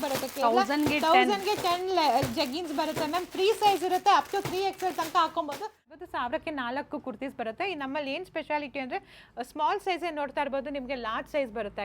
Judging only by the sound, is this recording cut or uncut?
cut